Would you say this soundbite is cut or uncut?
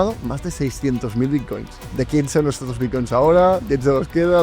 cut